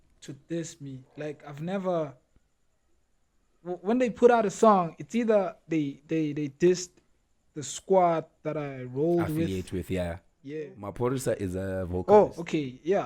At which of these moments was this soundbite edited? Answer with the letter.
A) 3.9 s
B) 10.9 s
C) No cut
B